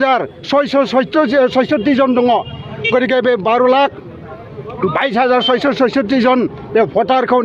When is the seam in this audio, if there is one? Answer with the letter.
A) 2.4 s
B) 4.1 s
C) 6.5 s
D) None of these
D